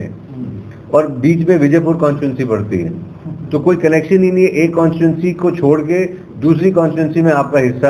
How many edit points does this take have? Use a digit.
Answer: 0